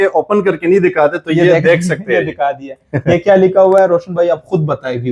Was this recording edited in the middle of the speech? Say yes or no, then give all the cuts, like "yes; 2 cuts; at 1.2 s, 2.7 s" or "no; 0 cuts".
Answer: no; 0 cuts